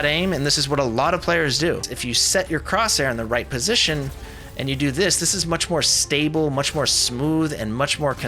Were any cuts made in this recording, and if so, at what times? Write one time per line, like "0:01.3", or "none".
0:01.8